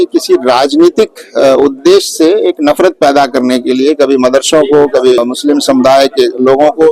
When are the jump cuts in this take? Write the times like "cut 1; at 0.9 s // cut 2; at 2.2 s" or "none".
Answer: cut 1; at 5.2 s